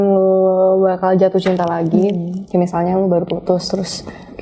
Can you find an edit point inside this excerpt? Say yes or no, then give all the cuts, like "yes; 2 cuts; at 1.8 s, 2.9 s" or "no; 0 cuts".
no; 0 cuts